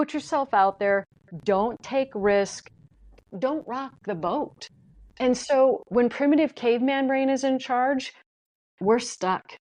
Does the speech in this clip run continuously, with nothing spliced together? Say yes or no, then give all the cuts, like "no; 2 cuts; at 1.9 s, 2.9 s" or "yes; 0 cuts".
no; 2 cuts; at 3.3 s, 5.1 s